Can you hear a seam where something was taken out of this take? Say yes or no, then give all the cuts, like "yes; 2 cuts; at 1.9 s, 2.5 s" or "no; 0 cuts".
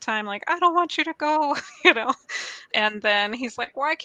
yes; 1 cut; at 2.6 s